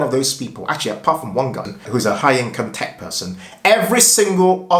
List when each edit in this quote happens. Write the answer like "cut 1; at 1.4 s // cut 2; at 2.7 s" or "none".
cut 1; at 1.7 s

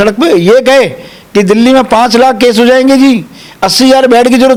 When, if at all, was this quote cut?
none

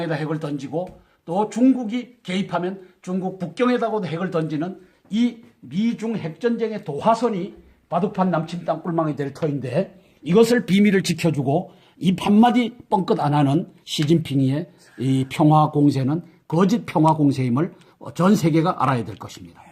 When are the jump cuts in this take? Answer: cut 1; at 1.2 s

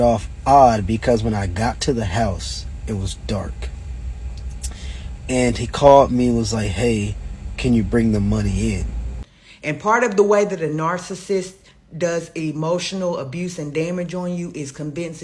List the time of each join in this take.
cut 1; at 9.1 s

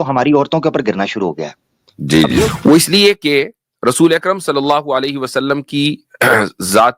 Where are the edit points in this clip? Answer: cut 1; at 2.5 s

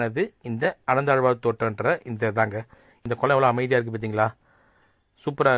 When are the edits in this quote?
cut 1; at 3.0 s

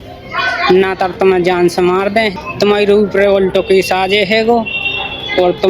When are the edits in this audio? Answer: cut 1; at 2.3 s

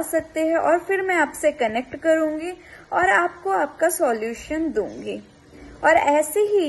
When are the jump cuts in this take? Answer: none

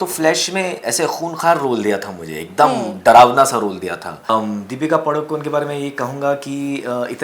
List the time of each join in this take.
cut 1; at 4.3 s

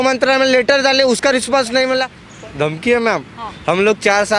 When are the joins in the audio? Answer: cut 1; at 2.2 s

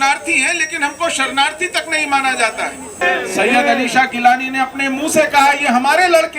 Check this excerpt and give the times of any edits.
cut 1; at 3.0 s

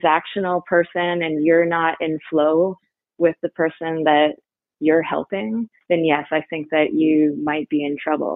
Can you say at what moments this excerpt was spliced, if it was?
none

